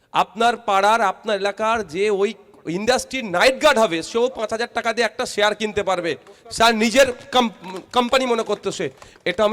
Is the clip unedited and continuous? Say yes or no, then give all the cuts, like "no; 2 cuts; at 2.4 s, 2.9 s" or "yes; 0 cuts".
yes; 0 cuts